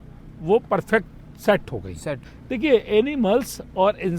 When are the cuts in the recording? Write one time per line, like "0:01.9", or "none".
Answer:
0:02.3